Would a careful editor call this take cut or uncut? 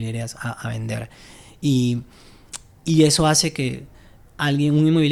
uncut